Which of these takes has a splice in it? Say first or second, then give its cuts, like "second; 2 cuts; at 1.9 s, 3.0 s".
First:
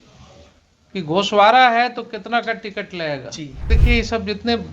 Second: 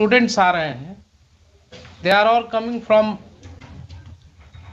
first; 1 cut; at 3.7 s